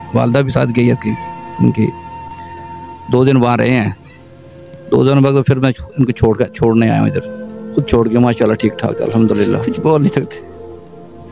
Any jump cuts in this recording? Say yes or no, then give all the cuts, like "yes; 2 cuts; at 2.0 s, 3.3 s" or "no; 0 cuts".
yes; 2 cuts; at 9.6 s, 10.4 s